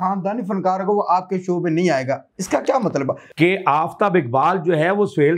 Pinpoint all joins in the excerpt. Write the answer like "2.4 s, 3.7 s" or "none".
3.2 s